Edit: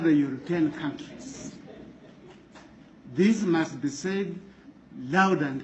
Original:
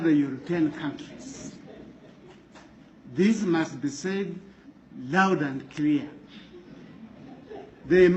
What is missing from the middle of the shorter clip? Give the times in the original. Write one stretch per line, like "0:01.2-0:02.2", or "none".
none